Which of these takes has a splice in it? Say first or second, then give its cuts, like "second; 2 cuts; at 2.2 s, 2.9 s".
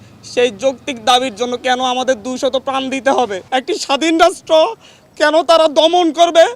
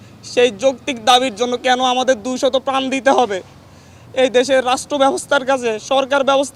first; 1 cut; at 3.4 s